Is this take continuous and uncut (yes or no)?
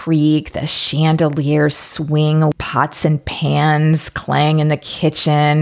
no